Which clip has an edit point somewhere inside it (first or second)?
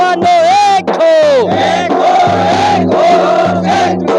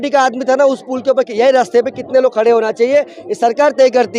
first